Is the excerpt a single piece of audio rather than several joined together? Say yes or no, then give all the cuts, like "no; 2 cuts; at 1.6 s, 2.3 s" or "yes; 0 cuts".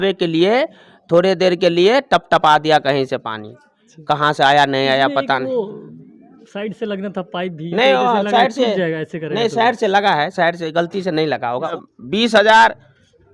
no; 1 cut; at 11.7 s